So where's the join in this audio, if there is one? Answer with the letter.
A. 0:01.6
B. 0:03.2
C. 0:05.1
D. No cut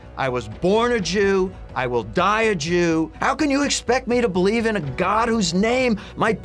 B